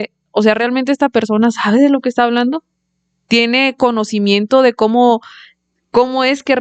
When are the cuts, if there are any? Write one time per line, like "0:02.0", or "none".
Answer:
none